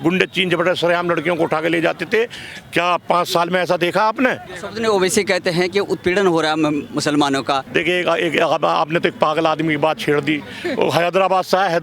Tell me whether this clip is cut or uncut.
cut